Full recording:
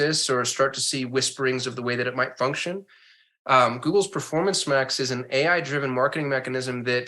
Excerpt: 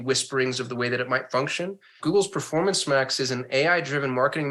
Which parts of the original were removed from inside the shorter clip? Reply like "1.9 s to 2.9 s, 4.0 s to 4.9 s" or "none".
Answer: 3.0 s to 3.8 s